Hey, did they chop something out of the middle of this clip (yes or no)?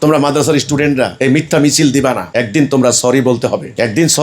yes